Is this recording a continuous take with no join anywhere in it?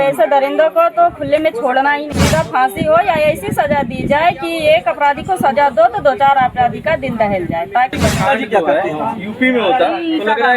no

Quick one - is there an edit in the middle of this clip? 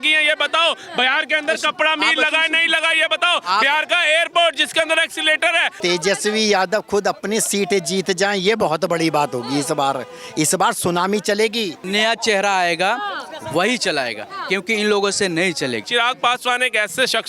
yes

